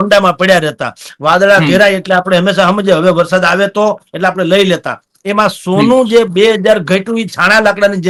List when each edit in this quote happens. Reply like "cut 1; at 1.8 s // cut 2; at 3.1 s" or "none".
none